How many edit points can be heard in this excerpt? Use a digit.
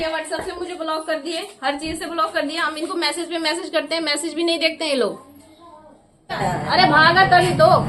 1